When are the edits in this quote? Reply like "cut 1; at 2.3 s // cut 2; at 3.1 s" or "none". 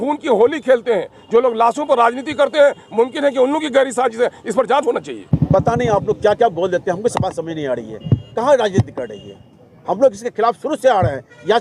cut 1; at 5.3 s